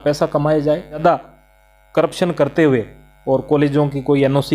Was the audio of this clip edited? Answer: yes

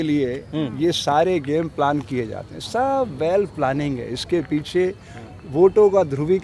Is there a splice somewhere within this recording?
no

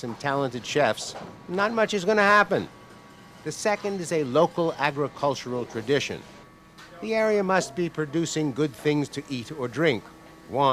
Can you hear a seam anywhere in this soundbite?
yes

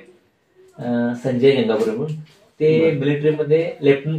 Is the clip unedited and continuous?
yes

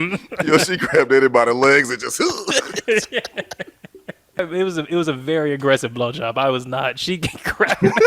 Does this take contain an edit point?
yes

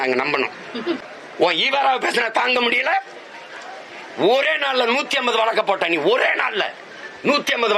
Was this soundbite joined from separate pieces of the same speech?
yes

